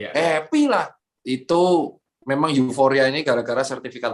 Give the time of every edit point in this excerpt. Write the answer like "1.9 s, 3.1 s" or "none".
1.1 s